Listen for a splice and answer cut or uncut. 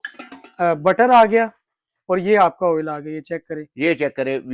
uncut